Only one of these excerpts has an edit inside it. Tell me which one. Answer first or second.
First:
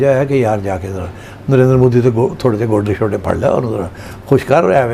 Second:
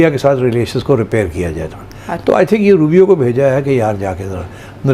second